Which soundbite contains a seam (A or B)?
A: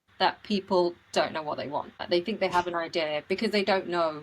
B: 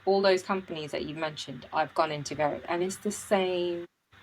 A